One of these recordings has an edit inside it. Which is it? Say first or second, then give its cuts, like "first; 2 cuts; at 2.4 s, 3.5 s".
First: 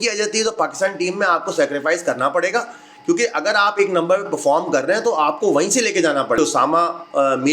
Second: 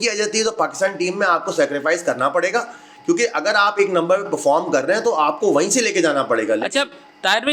first; 1 cut; at 6.4 s